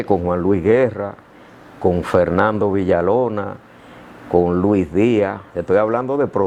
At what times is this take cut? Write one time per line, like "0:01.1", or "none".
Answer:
none